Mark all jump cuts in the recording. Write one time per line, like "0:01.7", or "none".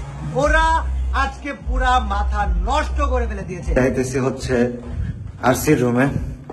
0:03.7